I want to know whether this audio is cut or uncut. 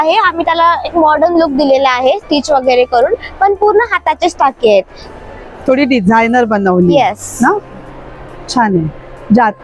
uncut